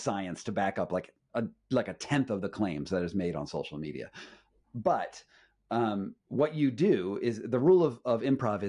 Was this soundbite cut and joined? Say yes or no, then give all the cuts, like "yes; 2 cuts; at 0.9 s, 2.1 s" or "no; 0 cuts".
no; 0 cuts